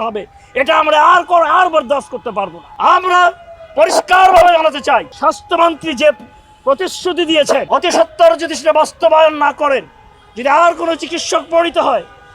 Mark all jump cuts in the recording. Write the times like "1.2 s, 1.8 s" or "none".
2.6 s, 5.1 s, 7.7 s